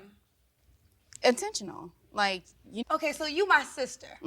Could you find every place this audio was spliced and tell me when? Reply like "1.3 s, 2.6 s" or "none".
2.8 s